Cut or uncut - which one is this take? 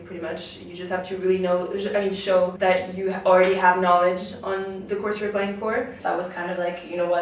cut